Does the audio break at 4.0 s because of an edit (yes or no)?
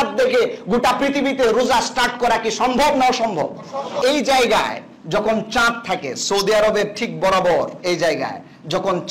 yes